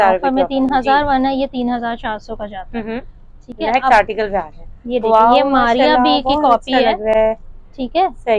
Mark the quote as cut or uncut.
uncut